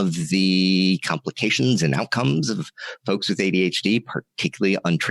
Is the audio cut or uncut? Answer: uncut